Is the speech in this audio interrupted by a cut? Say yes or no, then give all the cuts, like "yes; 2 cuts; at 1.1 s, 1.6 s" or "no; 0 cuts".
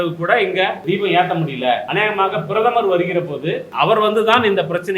yes; 3 cuts; at 0.8 s, 1.9 s, 3.7 s